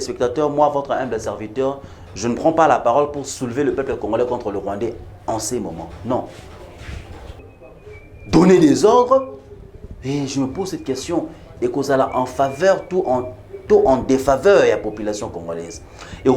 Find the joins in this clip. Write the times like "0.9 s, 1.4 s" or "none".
7.5 s